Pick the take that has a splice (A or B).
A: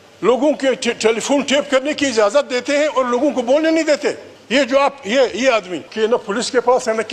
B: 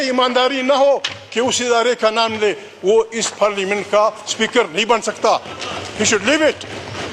A